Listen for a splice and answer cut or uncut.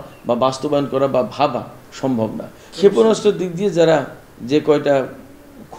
cut